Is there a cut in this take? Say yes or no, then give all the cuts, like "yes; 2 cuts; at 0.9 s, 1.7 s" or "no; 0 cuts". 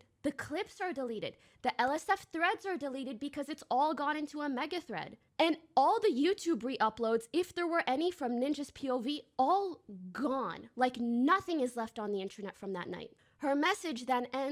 no; 0 cuts